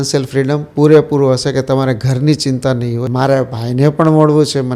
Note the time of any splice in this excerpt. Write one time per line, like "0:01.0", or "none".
0:03.1